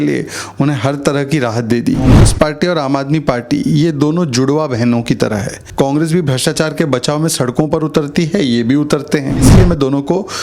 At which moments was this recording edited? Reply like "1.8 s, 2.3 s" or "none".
2.3 s, 5.6 s, 9.5 s